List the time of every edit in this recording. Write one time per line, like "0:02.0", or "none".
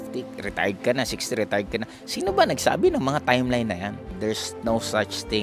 0:04.1